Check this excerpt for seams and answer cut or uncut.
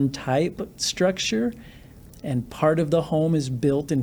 uncut